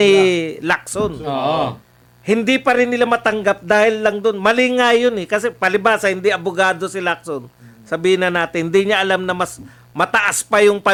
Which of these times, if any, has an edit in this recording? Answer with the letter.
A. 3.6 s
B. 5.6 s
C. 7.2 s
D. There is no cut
D